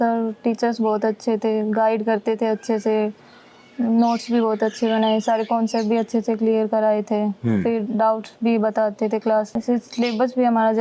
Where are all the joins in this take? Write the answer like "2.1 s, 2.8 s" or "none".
9.5 s